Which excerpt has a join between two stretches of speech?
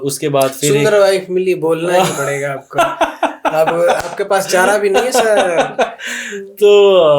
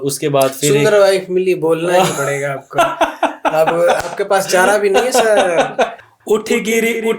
second; 1 cut; at 6.1 s

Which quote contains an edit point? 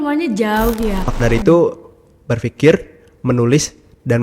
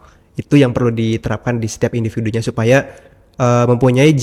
first; 1 cut; at 1.1 s

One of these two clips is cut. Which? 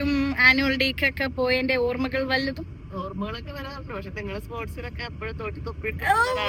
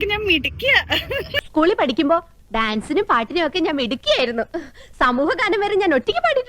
second; 1 cut; at 1.4 s

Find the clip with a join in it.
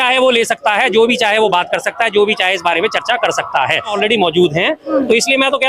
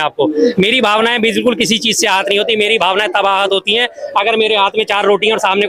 first; 1 cut; at 3.9 s

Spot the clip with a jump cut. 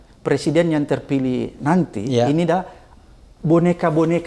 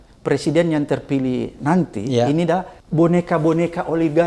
second; 1 cut; at 2.8 s

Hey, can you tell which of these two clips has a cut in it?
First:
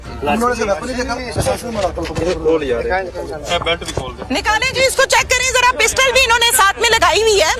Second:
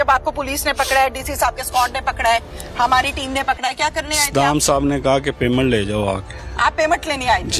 first; 1 cut; at 1.4 s

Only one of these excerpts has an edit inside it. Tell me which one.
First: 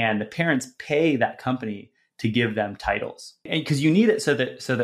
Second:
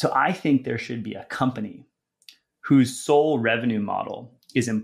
first; 1 cut; at 3.5 s

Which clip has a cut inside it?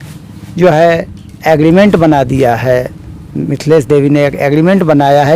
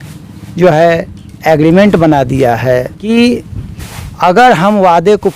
second; 1 cut; at 3.0 s

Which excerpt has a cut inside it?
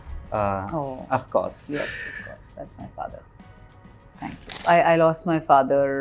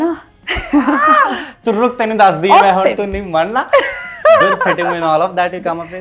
first; 1 cut; at 4.5 s

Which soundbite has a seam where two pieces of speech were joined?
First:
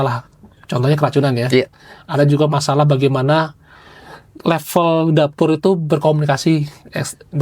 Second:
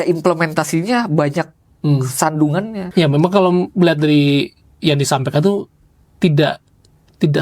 second; 1 cut; at 2.8 s

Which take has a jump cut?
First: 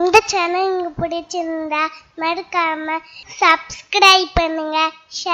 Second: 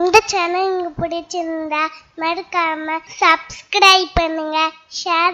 second; 1 cut; at 3.1 s

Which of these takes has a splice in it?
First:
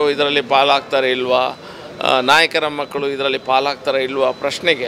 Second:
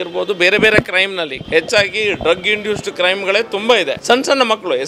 second; 2 cuts; at 1.4 s, 4.0 s

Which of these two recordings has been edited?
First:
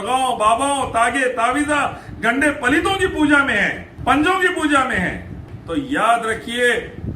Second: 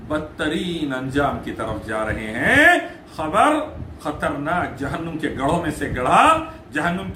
first; 2 cuts; at 3.8 s, 5.5 s

